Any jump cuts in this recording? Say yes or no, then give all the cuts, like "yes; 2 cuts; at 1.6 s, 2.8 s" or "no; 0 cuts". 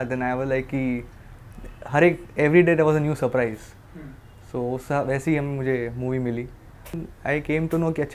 yes; 1 cut; at 7.1 s